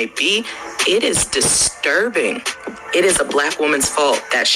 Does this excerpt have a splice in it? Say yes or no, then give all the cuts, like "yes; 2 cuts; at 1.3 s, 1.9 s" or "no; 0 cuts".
yes; 1 cut; at 1.1 s